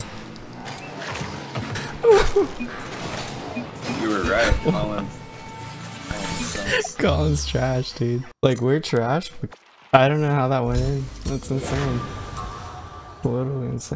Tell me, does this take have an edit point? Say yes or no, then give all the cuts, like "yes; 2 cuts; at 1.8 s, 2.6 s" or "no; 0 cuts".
yes; 2 cuts; at 8.3 s, 9.4 s